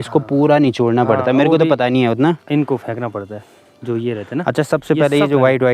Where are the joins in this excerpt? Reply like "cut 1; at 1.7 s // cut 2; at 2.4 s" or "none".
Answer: none